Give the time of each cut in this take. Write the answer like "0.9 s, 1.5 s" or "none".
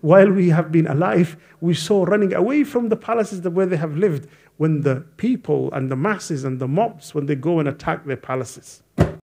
none